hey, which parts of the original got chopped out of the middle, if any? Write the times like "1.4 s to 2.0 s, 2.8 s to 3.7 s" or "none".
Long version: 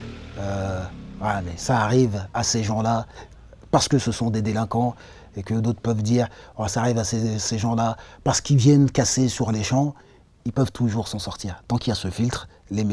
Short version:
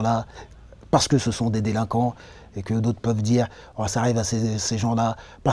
none